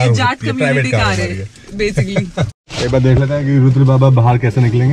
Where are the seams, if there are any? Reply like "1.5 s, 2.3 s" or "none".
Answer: none